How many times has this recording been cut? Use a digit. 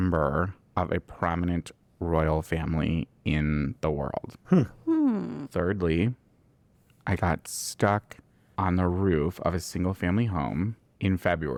0